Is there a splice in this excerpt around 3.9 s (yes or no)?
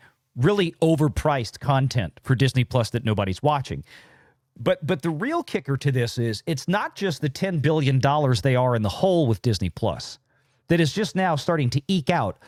no